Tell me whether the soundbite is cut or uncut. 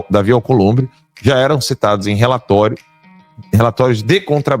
uncut